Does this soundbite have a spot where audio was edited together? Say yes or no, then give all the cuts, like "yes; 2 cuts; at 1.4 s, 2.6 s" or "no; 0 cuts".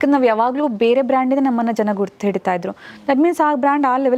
no; 0 cuts